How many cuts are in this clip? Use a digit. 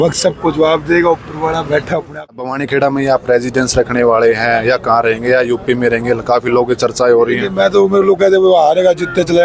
1